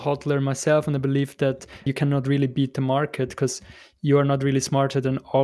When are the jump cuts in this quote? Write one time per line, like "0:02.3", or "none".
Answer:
0:01.9